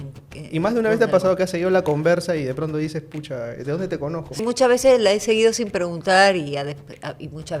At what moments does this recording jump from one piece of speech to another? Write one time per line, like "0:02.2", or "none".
0:04.4

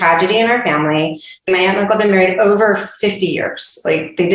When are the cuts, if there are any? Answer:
0:01.5

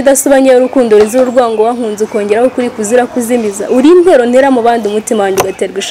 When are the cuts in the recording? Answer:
none

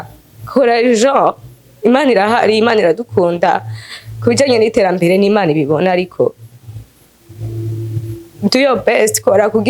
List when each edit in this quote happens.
none

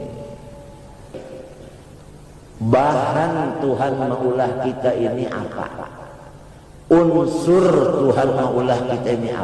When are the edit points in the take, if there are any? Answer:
0:01.1

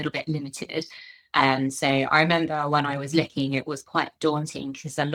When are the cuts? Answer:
none

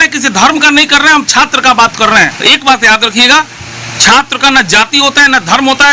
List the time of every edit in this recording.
0:02.3

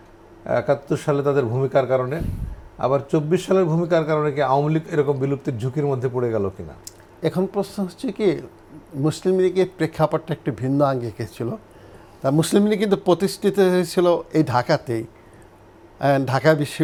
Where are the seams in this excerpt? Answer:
none

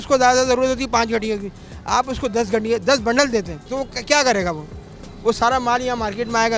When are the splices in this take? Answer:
0:03.6

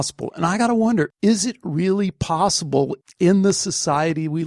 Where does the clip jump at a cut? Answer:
0:01.1

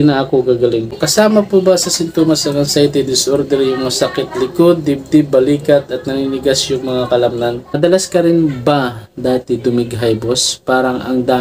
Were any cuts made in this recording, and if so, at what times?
0:01.0
0:07.8

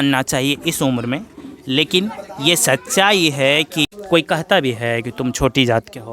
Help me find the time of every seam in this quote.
0:03.9

